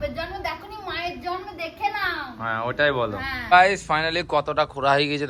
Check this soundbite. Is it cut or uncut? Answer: uncut